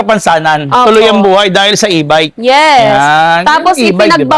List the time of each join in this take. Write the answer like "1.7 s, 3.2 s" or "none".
none